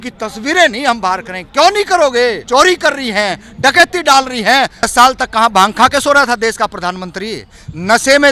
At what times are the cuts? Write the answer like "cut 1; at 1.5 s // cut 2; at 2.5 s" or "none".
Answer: cut 1; at 2.4 s // cut 2; at 4.9 s